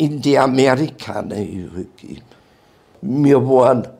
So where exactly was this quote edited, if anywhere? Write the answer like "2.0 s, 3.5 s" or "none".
2.9 s